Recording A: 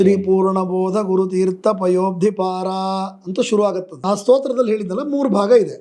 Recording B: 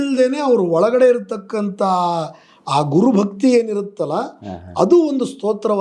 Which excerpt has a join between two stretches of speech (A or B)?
A